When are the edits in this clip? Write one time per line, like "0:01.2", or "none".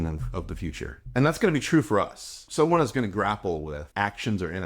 0:01.0
0:02.4
0:03.8